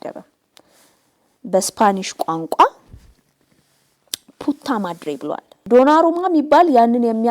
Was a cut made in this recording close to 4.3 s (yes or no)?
no